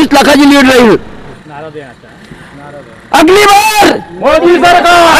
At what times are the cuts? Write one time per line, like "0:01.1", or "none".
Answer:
0:01.4